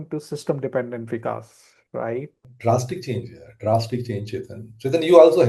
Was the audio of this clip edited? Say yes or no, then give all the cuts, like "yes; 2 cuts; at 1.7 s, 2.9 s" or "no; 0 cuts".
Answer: yes; 1 cut; at 2.4 s